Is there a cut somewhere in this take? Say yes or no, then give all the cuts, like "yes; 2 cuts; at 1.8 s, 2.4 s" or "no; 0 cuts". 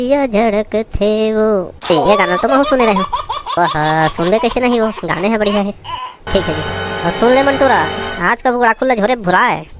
yes; 1 cut; at 6.2 s